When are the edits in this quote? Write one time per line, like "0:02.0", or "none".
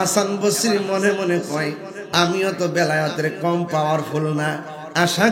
none